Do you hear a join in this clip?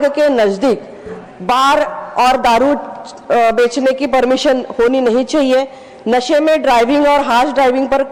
no; 0 cuts

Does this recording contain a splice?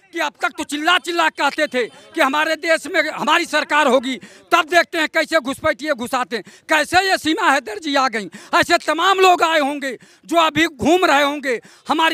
no; 0 cuts

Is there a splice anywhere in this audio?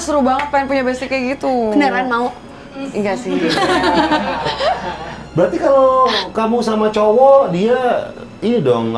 no; 0 cuts

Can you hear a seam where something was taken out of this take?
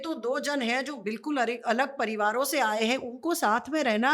no; 0 cuts

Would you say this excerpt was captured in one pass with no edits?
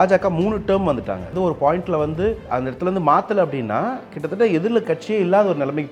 no; 2 cuts; at 1.3 s, 2.4 s

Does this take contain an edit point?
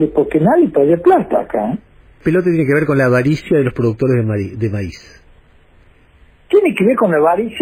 yes; 1 cut; at 2.2 s

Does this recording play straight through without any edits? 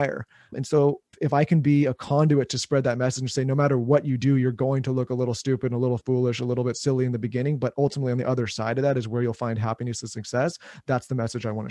no; 1 cut; at 1.1 s

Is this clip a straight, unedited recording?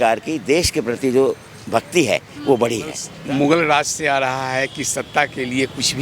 no; 1 cut; at 3.1 s

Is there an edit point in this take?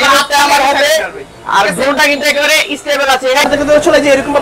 yes; 1 cut; at 3.5 s

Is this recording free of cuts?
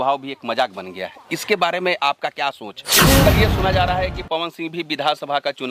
no; 1 cut; at 3.2 s

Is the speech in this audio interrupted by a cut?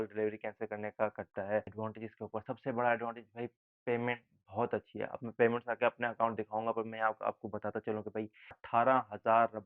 yes; 2 cuts; at 1.6 s, 8.5 s

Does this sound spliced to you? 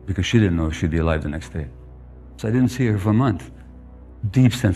yes; 1 cut; at 2.3 s

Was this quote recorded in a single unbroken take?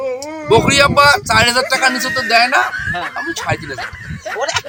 yes; 0 cuts

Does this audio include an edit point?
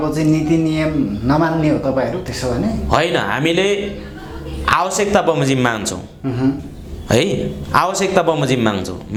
no; 0 cuts

